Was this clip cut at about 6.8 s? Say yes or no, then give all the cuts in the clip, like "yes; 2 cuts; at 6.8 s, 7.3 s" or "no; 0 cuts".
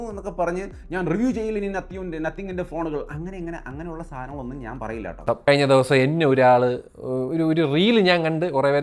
no; 1 cut; at 5.2 s